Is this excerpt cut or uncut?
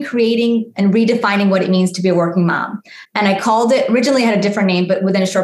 uncut